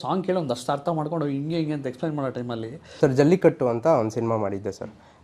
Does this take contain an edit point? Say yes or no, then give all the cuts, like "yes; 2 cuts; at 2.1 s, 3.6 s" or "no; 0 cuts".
yes; 1 cut; at 2.8 s